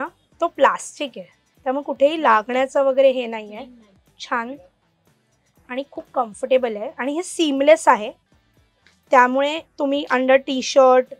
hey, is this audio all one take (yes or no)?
yes